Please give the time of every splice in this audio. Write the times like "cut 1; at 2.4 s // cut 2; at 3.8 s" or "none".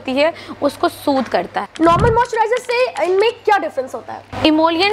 cut 1; at 1.6 s